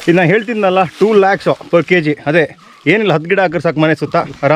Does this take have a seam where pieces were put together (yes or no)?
no